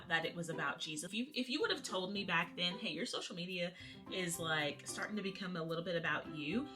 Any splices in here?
yes; 1 cut; at 1.1 s

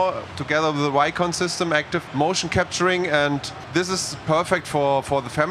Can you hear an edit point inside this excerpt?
yes; 2 cuts; at 2.0 s, 3.5 s

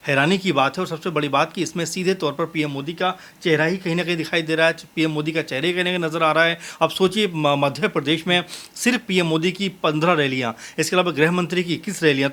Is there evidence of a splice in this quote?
no; 0 cuts

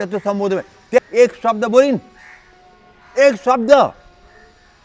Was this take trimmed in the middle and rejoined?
yes; 1 cut; at 1.0 s

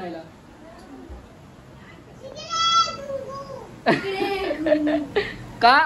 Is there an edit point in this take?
no; 0 cuts

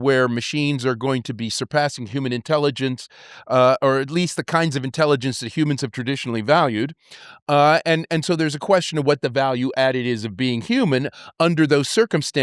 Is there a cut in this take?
no; 0 cuts

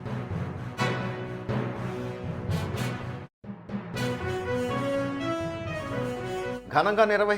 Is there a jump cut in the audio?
yes; 3 cuts; at 0.8 s, 3.3 s, 5.3 s

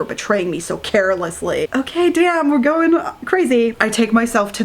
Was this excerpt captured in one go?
no; 1 cut; at 3.7 s

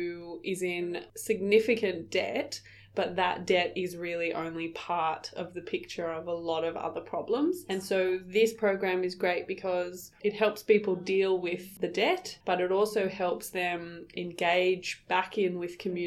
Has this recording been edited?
no; 0 cuts

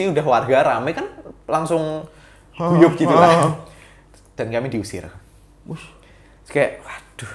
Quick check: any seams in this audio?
no; 0 cuts

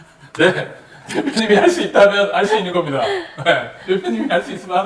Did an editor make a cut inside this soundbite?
no; 0 cuts

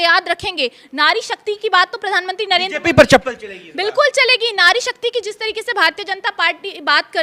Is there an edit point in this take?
no; 0 cuts

